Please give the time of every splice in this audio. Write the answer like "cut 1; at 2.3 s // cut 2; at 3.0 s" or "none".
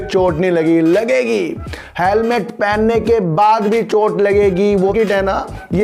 cut 1; at 4.9 s